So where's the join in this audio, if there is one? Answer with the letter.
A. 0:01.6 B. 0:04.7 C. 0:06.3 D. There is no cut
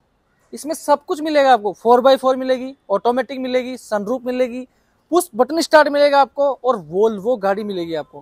D